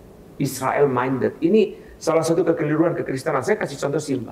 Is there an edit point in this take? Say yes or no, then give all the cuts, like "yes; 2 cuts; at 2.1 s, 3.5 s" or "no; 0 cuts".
no; 0 cuts